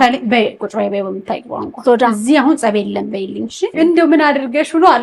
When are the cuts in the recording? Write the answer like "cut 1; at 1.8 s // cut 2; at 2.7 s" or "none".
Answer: cut 1; at 3.7 s